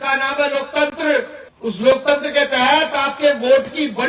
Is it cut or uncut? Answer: cut